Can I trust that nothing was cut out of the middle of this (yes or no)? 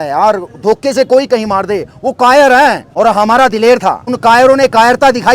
no